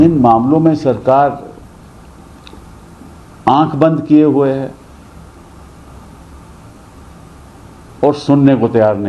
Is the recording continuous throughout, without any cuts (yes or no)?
yes